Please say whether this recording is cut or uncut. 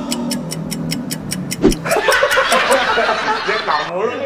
uncut